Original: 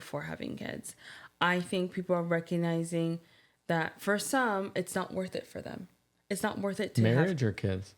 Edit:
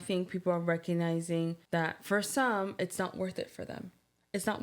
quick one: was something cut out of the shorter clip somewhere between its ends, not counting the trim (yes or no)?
yes